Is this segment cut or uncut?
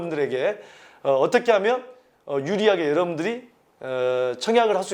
uncut